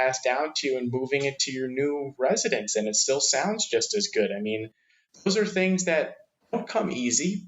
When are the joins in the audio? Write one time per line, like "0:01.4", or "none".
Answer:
0:06.3